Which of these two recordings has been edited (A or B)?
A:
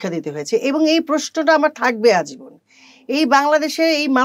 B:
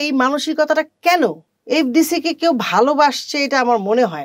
B